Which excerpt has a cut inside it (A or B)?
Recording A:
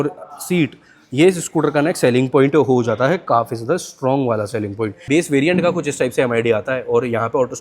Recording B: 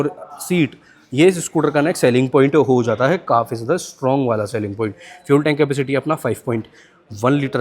A